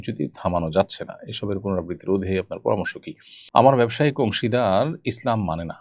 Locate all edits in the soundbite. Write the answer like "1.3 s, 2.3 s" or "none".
3.3 s